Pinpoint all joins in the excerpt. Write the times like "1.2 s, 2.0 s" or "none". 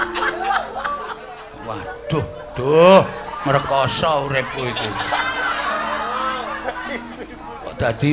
1.2 s

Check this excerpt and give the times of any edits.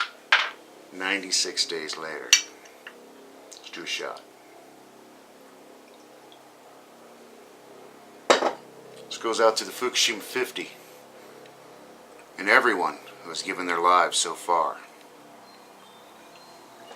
11.2 s

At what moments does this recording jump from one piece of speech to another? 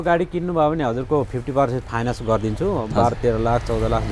none

